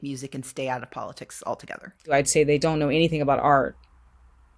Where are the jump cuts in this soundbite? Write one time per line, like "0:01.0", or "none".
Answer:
0:02.1